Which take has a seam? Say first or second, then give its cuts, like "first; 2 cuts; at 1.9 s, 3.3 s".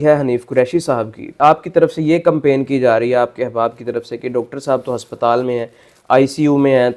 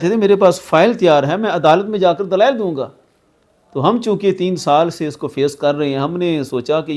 first; 1 cut; at 1.4 s